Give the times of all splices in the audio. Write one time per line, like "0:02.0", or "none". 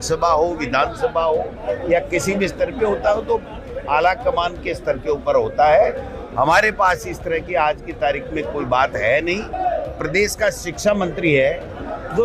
0:09.5